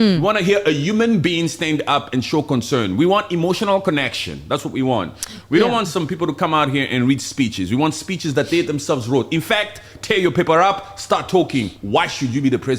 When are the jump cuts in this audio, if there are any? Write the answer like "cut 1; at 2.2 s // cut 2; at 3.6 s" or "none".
none